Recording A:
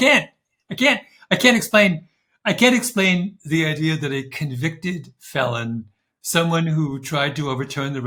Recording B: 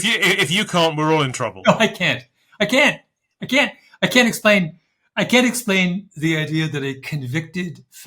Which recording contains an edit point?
B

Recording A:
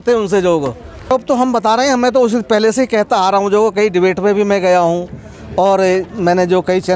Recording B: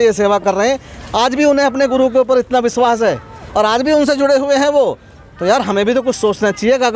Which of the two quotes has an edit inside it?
A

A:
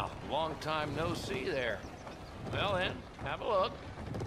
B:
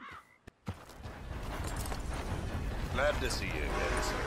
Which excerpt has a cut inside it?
B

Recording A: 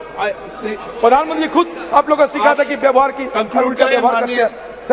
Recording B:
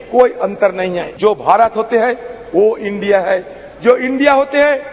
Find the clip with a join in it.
B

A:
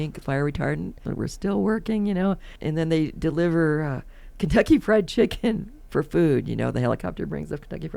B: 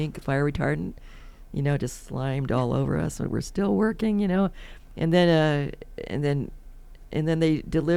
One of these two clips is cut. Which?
A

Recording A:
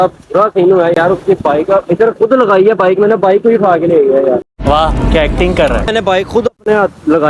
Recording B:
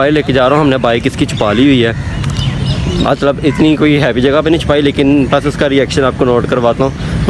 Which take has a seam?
A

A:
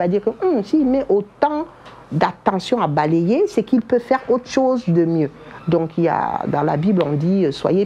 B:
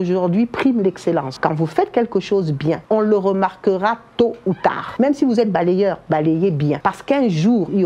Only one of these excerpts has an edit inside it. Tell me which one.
B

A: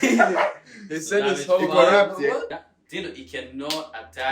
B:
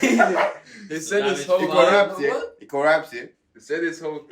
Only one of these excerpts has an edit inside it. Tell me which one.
A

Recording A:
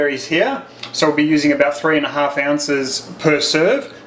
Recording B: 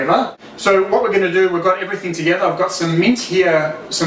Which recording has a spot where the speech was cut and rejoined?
A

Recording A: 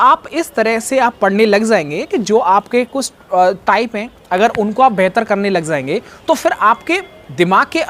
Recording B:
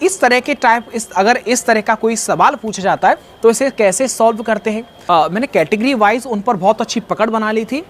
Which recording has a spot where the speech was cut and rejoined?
B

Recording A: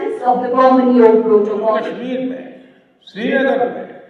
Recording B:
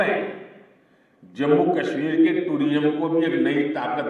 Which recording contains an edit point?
A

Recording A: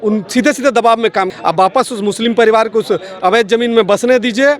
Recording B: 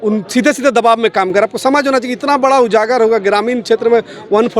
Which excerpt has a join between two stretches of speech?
A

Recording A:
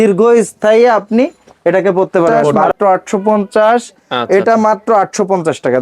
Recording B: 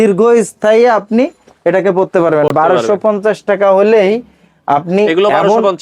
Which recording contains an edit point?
A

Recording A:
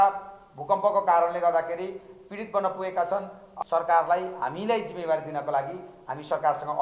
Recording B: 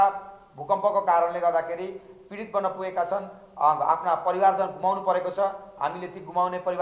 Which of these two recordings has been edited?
A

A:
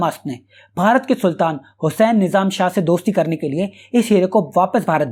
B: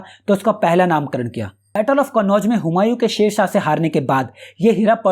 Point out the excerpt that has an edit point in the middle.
B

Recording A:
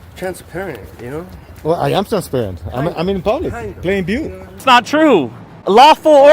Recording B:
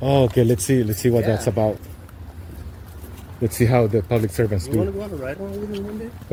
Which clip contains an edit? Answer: A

